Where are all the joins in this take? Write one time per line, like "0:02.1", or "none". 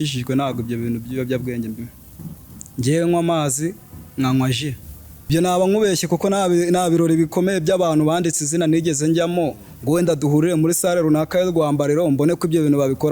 0:05.3